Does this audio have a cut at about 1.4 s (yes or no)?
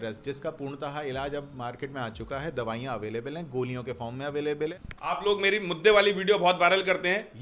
no